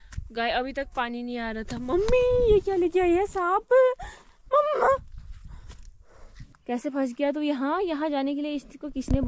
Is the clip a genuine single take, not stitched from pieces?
no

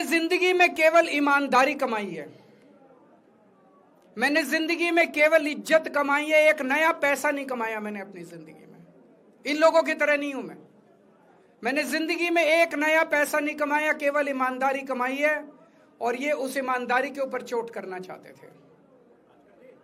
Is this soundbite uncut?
yes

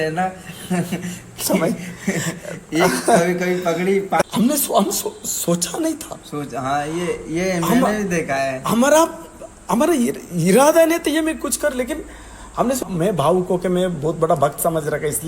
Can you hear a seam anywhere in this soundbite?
yes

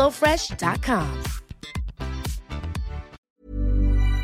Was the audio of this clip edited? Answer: yes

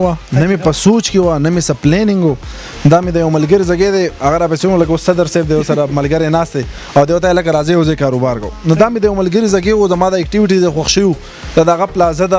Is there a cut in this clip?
no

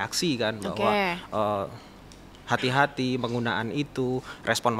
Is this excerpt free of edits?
yes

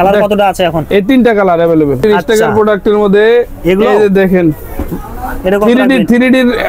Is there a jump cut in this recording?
yes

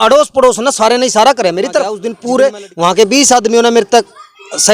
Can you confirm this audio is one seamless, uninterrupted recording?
no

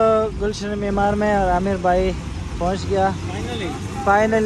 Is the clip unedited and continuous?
yes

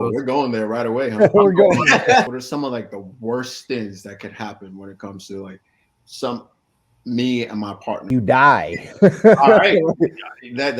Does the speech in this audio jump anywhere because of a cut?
yes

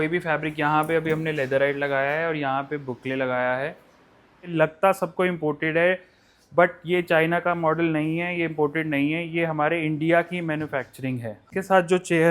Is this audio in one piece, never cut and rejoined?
no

